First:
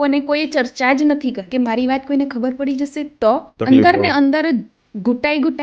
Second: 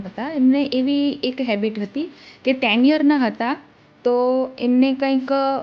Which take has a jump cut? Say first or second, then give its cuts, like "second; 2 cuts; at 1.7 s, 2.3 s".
first; 2 cuts; at 1.4 s, 3.5 s